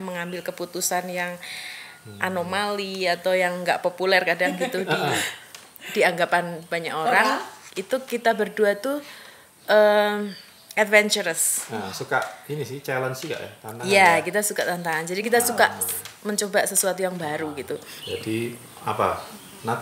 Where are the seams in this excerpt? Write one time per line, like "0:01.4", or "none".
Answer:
none